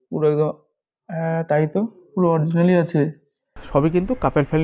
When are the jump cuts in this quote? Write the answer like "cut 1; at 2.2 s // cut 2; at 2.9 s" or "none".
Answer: cut 1; at 3.6 s